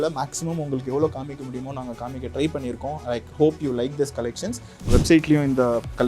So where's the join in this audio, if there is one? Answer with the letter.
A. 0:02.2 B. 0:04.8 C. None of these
B